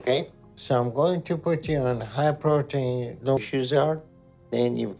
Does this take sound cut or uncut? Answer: uncut